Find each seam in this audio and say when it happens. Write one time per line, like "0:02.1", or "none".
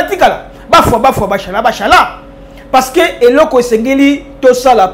none